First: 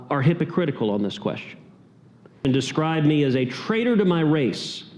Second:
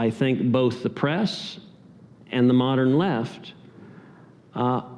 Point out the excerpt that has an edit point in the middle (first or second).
first